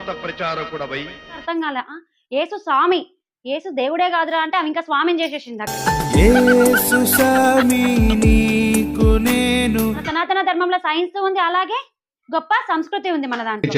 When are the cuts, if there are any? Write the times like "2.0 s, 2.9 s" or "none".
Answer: 1.4 s, 10.0 s